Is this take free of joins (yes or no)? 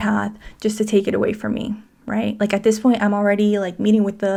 yes